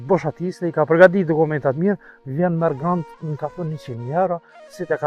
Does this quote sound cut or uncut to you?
uncut